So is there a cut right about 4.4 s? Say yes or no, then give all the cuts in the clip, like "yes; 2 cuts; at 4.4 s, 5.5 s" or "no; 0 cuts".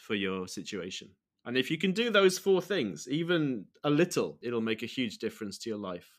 yes; 1 cut; at 4.4 s